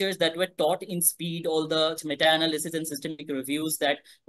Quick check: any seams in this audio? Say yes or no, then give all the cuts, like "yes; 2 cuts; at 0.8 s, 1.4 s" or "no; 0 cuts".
no; 0 cuts